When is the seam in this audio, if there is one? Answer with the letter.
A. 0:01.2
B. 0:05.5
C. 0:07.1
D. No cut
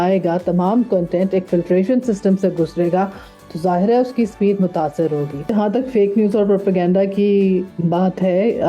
B